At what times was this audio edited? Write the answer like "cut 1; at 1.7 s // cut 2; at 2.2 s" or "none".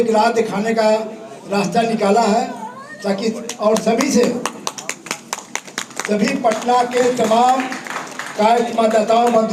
none